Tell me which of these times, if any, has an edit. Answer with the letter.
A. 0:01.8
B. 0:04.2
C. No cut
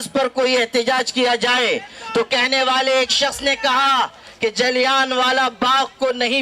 C